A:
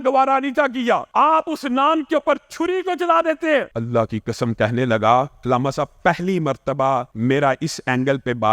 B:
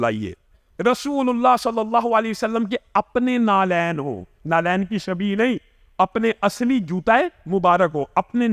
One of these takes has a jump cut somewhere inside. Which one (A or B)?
A